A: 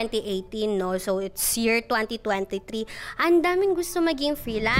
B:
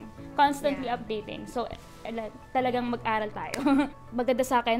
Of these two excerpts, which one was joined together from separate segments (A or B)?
B